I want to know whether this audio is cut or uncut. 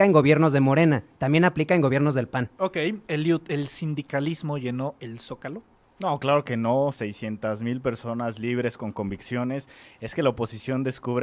uncut